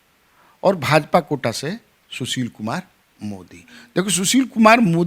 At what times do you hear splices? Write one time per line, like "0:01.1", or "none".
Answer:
none